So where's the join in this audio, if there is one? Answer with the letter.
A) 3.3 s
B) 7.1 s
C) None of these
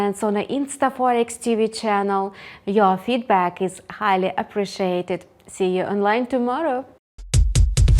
B